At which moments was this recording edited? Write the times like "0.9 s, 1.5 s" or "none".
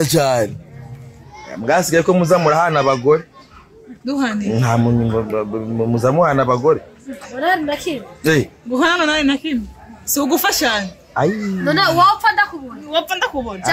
none